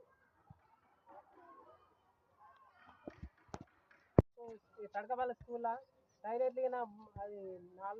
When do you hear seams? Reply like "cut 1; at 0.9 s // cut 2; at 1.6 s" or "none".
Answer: none